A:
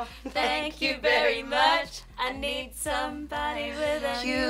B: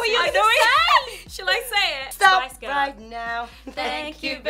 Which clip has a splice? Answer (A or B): B